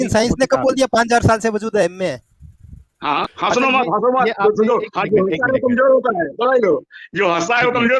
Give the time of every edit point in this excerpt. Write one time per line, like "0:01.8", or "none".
0:03.3